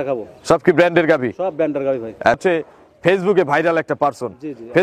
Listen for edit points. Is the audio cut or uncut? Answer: cut